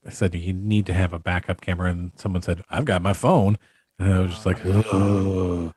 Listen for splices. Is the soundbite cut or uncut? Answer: uncut